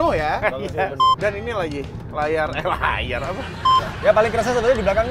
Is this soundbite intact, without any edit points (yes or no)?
no